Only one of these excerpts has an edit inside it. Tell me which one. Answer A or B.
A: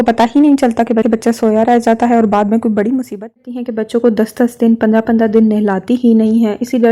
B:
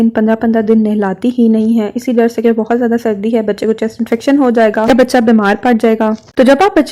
A